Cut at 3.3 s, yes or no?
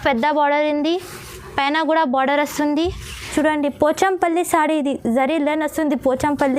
yes